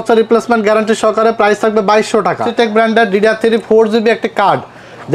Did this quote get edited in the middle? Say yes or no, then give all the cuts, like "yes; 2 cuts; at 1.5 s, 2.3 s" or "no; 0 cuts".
yes; 1 cut; at 2.5 s